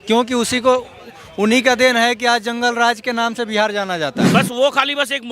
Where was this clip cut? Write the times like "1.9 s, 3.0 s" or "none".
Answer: 4.2 s